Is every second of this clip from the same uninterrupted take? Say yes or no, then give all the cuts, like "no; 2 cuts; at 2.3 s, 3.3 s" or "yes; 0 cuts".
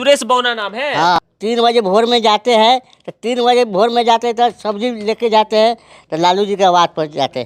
no; 1 cut; at 1.3 s